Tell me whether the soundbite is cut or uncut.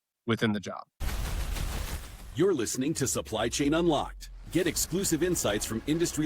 cut